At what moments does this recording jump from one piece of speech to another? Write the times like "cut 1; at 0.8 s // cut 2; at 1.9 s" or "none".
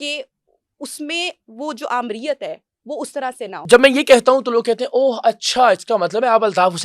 cut 1; at 3.6 s